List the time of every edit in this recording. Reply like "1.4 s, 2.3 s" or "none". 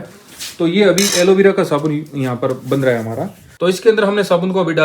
3.4 s